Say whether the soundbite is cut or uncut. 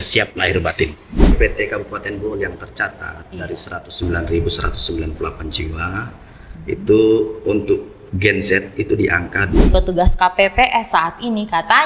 cut